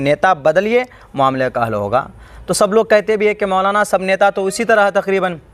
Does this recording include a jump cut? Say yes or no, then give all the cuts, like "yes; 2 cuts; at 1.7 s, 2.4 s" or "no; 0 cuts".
no; 0 cuts